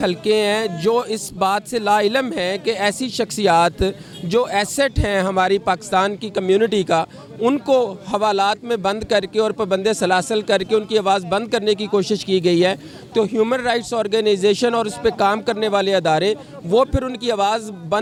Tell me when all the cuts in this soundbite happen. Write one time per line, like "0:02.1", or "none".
none